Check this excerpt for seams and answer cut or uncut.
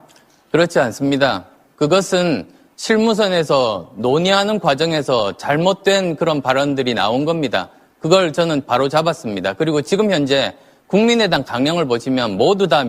cut